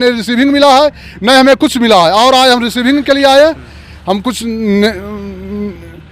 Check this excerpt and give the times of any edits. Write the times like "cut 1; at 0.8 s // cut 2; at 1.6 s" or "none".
none